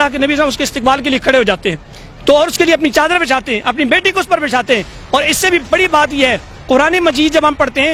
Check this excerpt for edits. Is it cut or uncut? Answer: uncut